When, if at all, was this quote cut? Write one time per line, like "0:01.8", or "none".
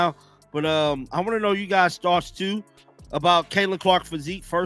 none